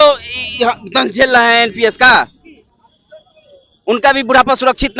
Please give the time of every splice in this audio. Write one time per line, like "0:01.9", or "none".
none